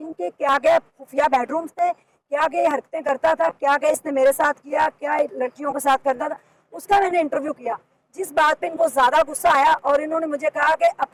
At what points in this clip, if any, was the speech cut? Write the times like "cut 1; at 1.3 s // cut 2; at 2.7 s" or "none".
none